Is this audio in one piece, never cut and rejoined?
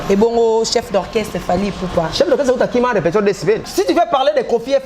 no; 1 cut; at 3.7 s

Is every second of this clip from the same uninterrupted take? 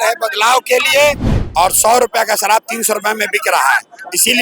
no; 1 cut; at 1.3 s

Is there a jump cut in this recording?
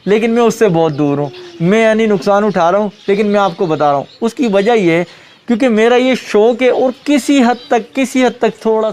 no; 0 cuts

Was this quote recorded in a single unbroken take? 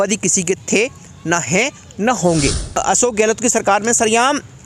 no; 1 cut; at 3.1 s

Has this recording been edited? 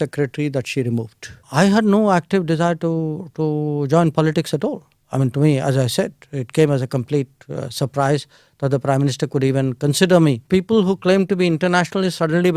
yes; 2 cuts; at 1.4 s, 10.4 s

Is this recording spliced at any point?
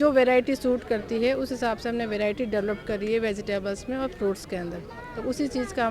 no; 0 cuts

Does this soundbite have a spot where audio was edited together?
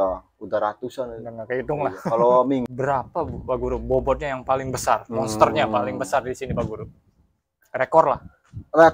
yes; 1 cut; at 2.7 s

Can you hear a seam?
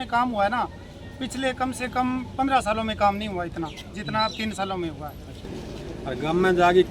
yes; 1 cut; at 5.6 s

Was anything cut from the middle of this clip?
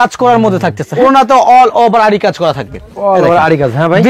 yes; 1 cut; at 1.0 s

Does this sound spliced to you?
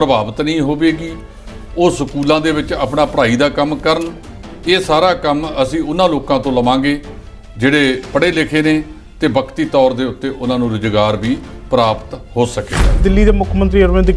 yes; 1 cut; at 13.0 s

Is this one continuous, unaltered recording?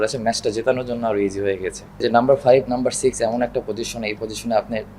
no; 1 cut; at 1.8 s

